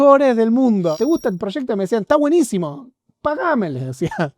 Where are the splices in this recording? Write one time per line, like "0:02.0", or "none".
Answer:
0:01.0